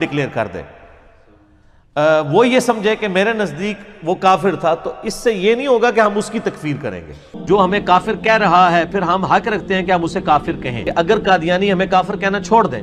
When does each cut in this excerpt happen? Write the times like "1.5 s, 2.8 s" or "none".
7.3 s, 10.8 s